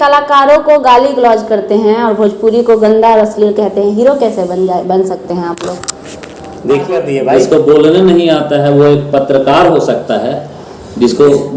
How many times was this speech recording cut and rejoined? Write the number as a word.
one